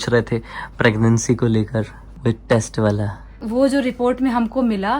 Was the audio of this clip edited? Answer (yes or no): yes